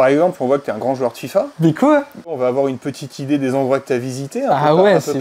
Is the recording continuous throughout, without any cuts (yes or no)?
no